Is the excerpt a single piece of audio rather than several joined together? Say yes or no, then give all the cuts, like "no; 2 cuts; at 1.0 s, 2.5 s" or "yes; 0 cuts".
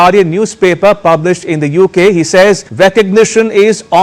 no; 1 cut; at 2.7 s